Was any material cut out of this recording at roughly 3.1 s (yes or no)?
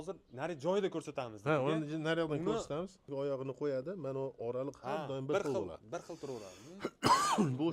yes